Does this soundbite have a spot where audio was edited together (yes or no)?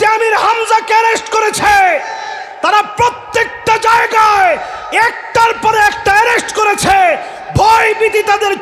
no